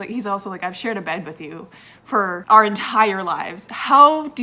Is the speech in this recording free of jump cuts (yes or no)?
yes